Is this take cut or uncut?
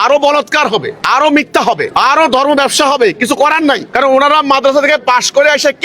cut